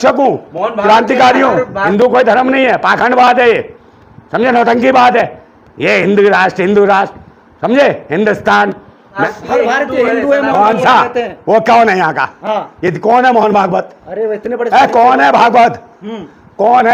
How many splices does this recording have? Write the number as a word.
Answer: two